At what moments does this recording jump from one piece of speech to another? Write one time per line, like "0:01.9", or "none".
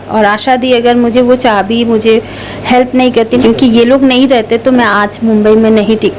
0:03.4